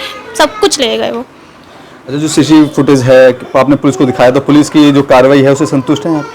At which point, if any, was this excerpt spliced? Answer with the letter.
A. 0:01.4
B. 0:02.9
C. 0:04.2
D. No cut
D